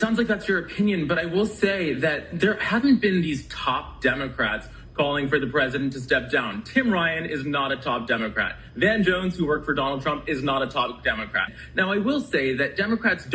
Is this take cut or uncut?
cut